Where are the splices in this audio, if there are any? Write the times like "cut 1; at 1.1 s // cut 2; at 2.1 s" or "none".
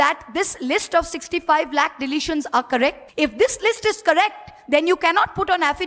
cut 1; at 3.0 s